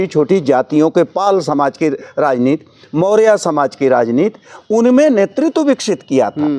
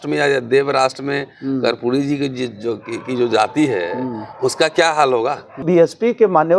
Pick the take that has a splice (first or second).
second